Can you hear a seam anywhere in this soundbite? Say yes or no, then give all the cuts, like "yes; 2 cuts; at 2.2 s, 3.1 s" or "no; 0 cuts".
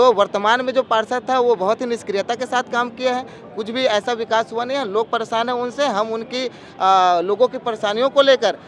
no; 0 cuts